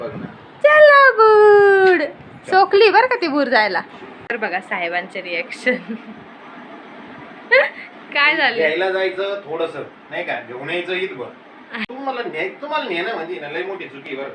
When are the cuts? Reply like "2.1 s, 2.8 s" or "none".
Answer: 4.3 s, 11.9 s